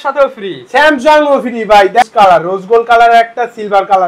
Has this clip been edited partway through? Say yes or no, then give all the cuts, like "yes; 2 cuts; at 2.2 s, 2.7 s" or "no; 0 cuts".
yes; 1 cut; at 2.1 s